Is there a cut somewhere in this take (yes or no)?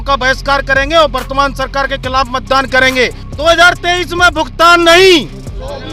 yes